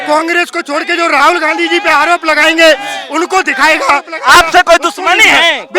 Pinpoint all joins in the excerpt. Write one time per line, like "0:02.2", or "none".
0:04.1